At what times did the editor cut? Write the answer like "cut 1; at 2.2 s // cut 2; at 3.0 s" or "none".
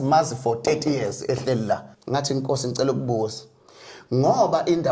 cut 1; at 1.9 s